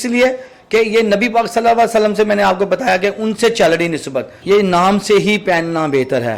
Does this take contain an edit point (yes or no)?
yes